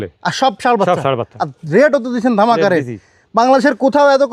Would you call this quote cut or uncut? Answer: uncut